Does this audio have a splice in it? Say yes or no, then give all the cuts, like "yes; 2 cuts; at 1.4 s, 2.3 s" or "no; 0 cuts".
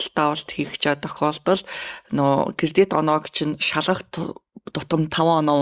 no; 0 cuts